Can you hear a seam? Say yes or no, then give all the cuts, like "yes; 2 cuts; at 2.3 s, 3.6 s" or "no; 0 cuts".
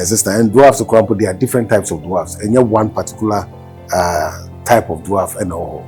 no; 0 cuts